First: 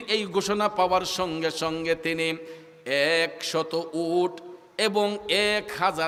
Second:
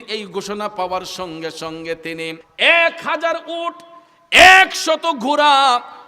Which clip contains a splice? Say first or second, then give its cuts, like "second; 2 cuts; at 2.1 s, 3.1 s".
second; 1 cut; at 2.4 s